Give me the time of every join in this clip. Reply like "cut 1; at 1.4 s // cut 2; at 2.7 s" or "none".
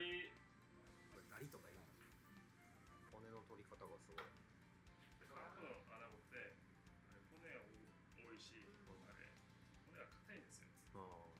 cut 1; at 3.1 s // cut 2; at 5.2 s